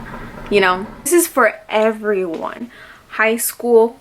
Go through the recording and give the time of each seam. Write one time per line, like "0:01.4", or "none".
0:01.1